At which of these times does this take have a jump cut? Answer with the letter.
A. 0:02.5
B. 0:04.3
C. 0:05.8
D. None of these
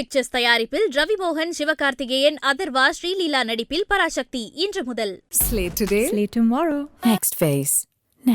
D